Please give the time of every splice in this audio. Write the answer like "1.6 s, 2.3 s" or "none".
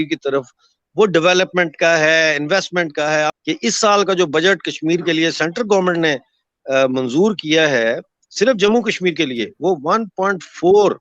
3.4 s